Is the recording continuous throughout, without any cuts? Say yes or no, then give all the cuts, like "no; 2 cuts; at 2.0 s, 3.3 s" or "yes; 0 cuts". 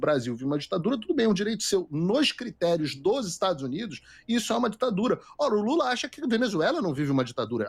yes; 0 cuts